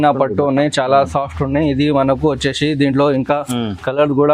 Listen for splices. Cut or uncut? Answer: uncut